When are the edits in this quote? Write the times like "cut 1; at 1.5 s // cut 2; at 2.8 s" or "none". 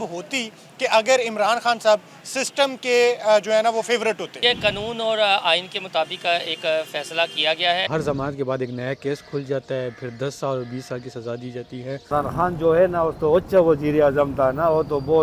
cut 1; at 4.4 s // cut 2; at 7.9 s // cut 3; at 12.0 s